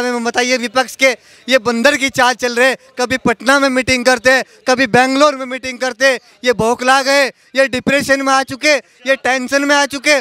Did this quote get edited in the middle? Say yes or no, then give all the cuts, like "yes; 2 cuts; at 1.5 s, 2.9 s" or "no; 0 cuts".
no; 0 cuts